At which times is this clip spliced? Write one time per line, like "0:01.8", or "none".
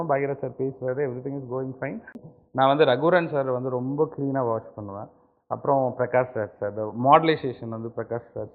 0:02.3